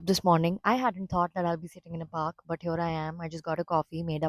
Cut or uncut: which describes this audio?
uncut